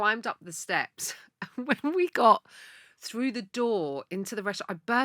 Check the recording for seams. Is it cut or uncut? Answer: uncut